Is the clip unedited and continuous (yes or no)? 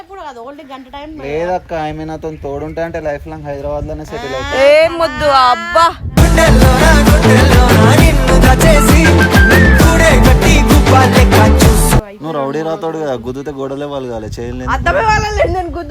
no